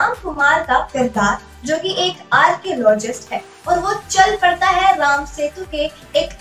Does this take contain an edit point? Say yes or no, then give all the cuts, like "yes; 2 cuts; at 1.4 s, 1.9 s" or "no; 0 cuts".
no; 0 cuts